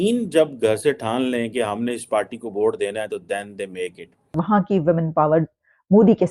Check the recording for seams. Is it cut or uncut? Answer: cut